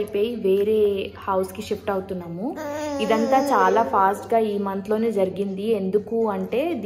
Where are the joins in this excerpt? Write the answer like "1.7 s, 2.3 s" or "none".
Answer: none